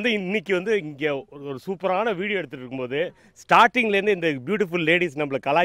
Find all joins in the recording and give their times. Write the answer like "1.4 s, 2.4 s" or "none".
none